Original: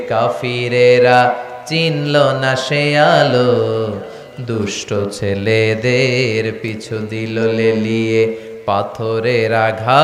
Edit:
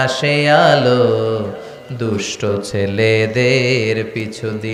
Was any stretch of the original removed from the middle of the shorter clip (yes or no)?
no